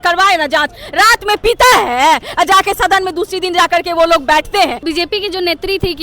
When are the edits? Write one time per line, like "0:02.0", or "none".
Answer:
0:04.8